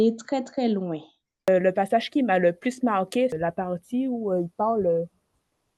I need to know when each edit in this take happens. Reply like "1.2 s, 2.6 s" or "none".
1.5 s, 3.3 s